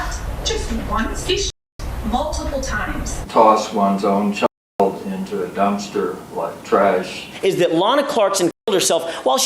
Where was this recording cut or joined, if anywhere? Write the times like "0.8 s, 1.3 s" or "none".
1.2 s, 3.2 s, 7.2 s